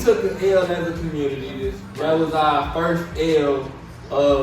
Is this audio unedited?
no; 1 cut; at 1.8 s

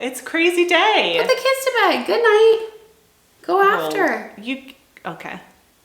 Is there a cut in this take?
no; 0 cuts

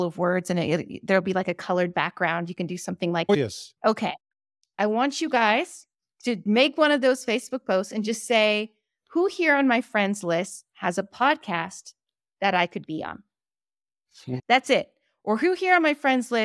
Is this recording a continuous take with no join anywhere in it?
yes; 0 cuts

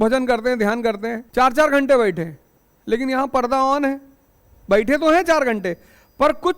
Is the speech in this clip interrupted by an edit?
yes; 1 cut; at 1.1 s

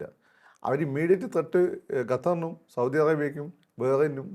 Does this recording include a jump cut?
no; 0 cuts

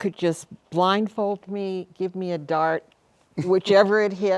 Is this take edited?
no; 0 cuts

